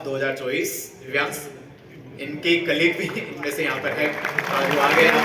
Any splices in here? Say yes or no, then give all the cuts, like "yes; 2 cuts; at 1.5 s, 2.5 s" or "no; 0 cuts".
yes; 1 cut; at 1.0 s